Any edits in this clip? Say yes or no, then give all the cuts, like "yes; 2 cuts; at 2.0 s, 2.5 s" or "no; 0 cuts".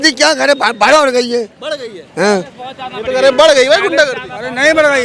no; 0 cuts